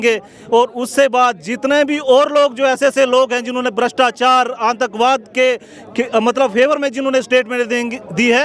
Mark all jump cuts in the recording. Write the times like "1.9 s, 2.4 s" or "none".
none